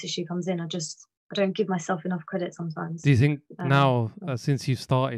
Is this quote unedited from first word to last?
yes; 0 cuts

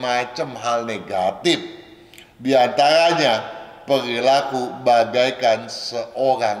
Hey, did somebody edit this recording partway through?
no; 0 cuts

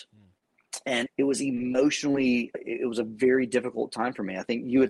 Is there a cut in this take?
yes; 2 cuts; at 1.1 s, 2.5 s

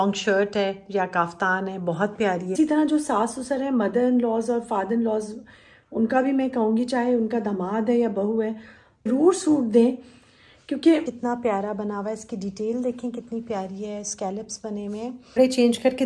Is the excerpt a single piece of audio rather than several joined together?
no; 4 cuts; at 2.5 s, 9.1 s, 11.1 s, 15.3 s

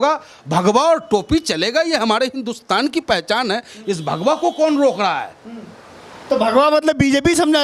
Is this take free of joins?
yes; 0 cuts

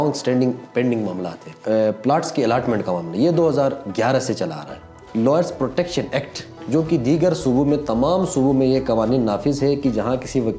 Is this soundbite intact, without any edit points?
no; 2 cuts; at 1.6 s, 5.0 s

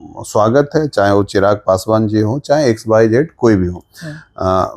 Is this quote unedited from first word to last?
yes; 0 cuts

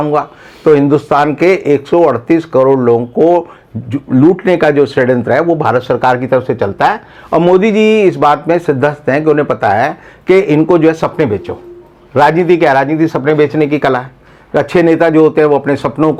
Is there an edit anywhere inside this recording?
no; 0 cuts

